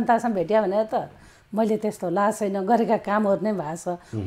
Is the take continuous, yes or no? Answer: yes